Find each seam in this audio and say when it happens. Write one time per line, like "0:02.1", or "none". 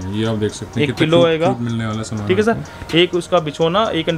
none